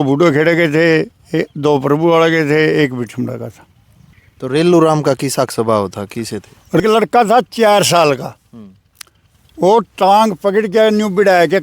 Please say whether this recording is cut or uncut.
cut